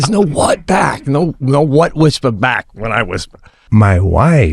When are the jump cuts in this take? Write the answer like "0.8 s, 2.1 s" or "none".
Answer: 3.6 s